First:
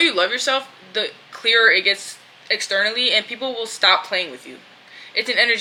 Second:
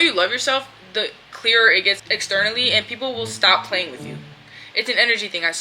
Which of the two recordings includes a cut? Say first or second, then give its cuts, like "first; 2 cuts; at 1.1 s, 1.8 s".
second; 1 cut; at 2.0 s